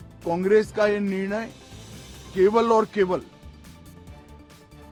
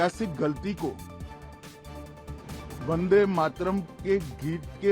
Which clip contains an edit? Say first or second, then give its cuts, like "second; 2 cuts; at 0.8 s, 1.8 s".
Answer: second; 2 cuts; at 1.0 s, 2.8 s